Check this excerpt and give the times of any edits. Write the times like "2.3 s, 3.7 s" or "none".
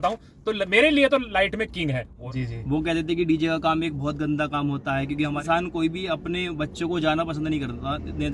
2.2 s, 5.4 s